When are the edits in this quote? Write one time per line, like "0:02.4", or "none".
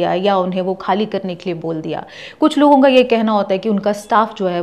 none